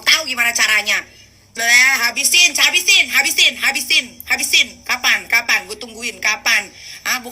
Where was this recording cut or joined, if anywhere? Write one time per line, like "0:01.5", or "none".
0:01.5